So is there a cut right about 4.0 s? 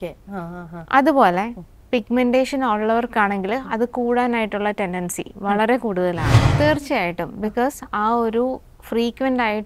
no; 1 cut; at 6.4 s

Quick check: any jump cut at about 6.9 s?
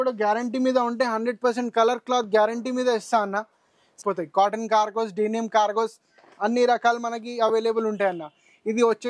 no; 1 cut; at 4.0 s

